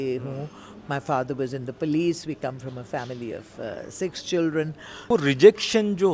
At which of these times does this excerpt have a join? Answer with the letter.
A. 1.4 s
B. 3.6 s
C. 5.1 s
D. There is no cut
C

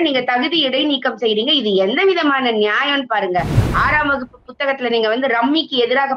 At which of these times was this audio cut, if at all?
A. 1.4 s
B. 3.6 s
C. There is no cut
B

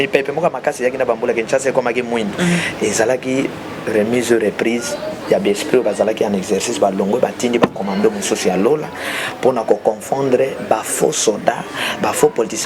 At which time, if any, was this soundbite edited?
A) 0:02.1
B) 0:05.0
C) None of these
C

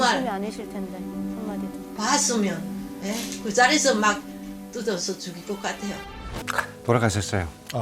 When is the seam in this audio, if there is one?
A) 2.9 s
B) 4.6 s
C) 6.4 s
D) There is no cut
C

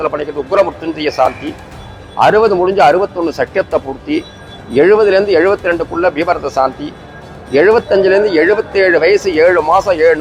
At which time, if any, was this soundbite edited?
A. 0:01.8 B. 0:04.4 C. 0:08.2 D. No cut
D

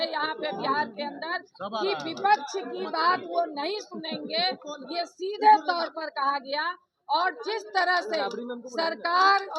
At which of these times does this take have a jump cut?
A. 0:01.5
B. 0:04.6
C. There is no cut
C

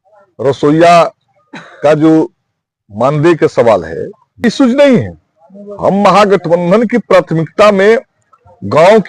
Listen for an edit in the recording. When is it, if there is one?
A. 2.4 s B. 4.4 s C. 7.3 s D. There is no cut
B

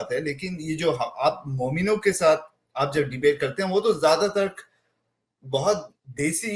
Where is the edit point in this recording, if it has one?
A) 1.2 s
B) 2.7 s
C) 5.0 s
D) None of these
D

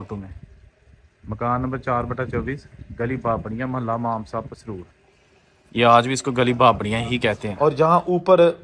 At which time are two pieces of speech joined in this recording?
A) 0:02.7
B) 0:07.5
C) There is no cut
B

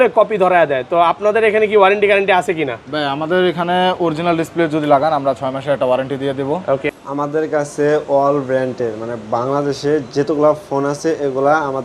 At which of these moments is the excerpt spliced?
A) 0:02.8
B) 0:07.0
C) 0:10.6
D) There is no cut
B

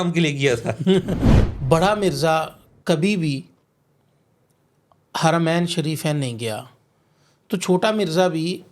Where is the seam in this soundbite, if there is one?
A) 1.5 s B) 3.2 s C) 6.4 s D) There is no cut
A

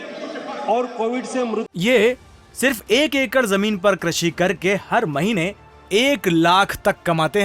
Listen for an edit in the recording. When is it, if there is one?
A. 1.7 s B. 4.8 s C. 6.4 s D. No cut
A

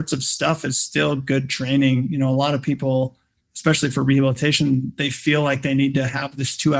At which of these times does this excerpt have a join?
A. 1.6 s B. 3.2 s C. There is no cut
C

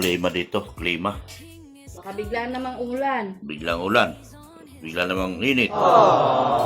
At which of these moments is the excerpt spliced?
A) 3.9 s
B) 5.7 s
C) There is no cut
B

